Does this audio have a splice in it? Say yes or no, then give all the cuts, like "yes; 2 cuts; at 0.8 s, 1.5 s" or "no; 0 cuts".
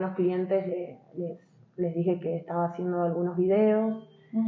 no; 0 cuts